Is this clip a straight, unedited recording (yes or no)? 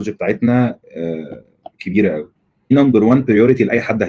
no